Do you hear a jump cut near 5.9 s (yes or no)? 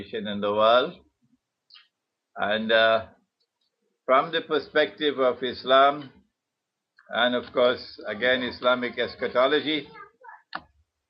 yes